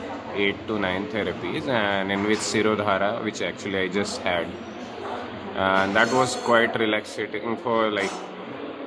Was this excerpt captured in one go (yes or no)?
yes